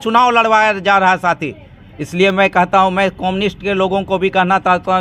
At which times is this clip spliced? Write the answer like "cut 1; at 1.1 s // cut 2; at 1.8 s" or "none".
none